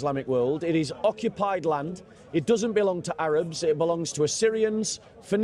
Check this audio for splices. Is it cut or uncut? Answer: uncut